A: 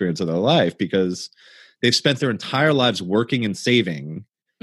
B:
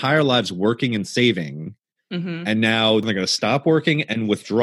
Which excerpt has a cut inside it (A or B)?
B